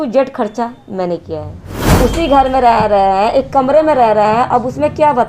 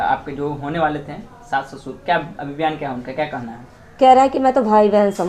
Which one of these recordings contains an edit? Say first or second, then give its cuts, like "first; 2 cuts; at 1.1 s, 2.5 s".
first; 1 cut; at 1.9 s